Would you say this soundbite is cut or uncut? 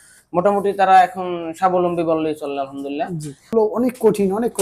cut